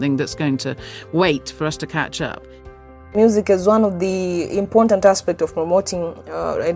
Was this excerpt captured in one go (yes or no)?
no